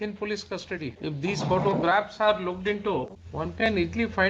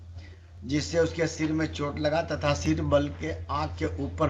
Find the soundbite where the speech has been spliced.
first; 2 cuts; at 1.0 s, 3.2 s

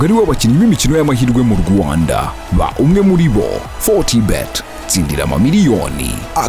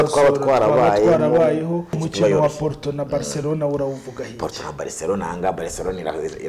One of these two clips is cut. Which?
second; 1 cut; at 2.1 s

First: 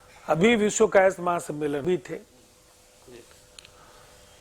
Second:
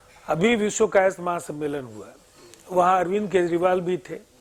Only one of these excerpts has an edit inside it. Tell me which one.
first; 1 cut; at 1.8 s

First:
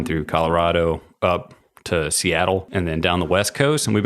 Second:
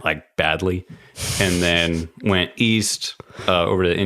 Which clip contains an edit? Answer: first; 1 cut; at 2.7 s

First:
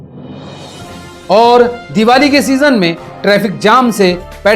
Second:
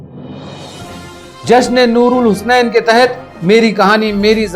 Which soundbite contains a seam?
second; 1 cut; at 1.0 s

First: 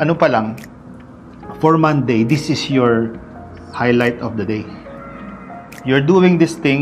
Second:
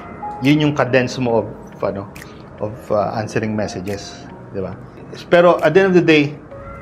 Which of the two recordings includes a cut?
second; 1 cut; at 5.1 s

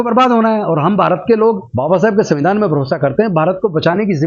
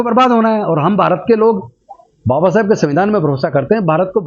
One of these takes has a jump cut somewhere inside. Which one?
first; 1 cut; at 1.7 s

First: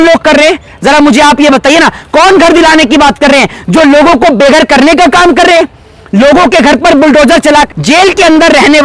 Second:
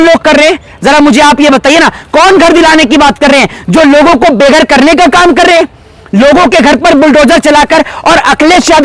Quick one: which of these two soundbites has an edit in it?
first; 1 cut; at 7.7 s

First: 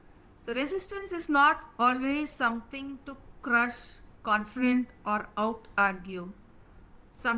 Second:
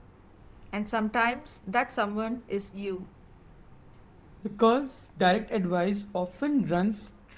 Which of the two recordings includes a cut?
second; 1 cut; at 4.4 s

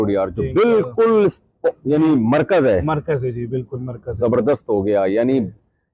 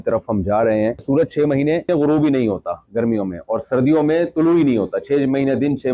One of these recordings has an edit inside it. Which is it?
second; 2 cuts; at 1.0 s, 1.9 s

